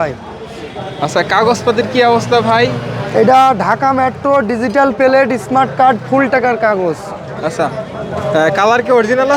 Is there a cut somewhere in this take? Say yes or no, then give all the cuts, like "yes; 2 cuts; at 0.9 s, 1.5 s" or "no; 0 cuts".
no; 0 cuts